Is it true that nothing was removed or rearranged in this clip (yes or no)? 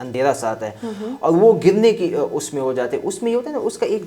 yes